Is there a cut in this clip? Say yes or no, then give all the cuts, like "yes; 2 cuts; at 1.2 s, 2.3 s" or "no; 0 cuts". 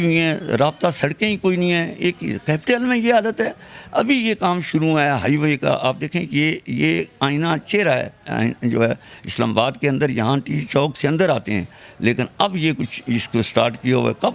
no; 0 cuts